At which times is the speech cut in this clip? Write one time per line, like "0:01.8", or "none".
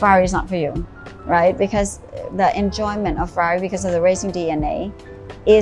none